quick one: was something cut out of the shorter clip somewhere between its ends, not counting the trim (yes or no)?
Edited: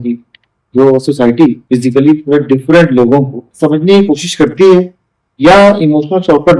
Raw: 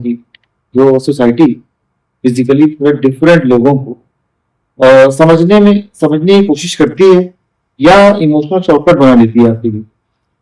yes